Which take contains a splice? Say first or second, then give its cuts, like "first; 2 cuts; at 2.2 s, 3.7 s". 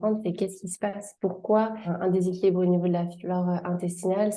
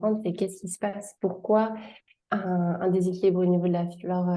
first; 1 cut; at 1.9 s